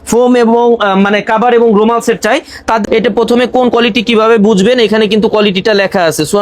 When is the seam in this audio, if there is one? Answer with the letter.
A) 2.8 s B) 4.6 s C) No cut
A